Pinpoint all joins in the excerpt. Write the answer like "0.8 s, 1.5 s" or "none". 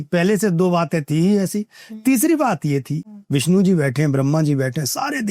3.0 s